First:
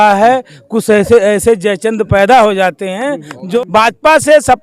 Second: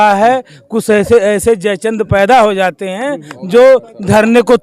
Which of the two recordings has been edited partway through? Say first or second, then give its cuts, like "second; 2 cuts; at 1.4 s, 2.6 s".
first; 1 cut; at 3.4 s